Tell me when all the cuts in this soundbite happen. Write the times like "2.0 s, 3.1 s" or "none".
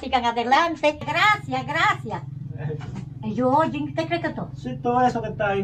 1.1 s